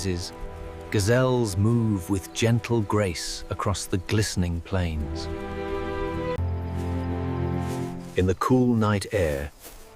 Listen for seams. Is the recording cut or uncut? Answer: uncut